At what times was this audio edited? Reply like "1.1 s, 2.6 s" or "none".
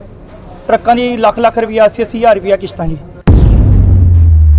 3.0 s